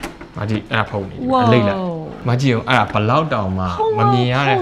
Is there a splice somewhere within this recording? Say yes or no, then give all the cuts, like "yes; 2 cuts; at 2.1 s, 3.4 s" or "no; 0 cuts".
yes; 1 cut; at 2.1 s